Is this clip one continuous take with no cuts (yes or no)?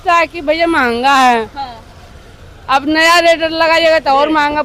yes